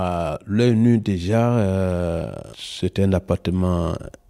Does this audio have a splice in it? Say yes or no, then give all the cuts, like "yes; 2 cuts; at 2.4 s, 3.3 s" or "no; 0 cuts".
no; 0 cuts